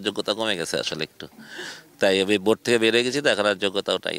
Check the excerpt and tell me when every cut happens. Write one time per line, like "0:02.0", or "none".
none